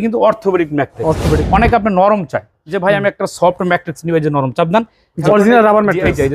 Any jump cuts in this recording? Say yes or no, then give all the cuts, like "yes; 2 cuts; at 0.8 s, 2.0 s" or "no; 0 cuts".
yes; 2 cuts; at 1.4 s, 5.2 s